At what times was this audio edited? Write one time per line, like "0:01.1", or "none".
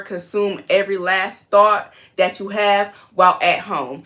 none